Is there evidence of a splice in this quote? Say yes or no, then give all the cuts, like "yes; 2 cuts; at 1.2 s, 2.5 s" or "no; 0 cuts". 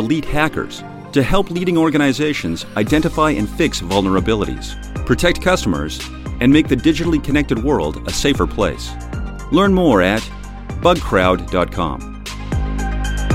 yes; 1 cut; at 12.2 s